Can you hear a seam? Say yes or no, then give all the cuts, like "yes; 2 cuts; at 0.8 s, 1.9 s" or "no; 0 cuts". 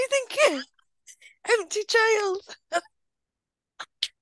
no; 0 cuts